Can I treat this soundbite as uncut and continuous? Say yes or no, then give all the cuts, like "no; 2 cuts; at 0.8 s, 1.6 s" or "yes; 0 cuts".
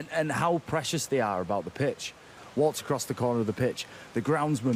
yes; 0 cuts